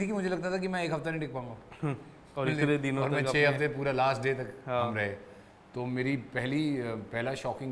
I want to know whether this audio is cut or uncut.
uncut